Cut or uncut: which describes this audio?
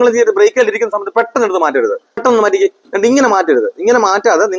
cut